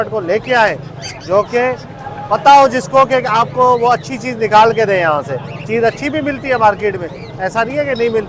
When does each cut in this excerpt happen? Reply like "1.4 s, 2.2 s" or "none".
none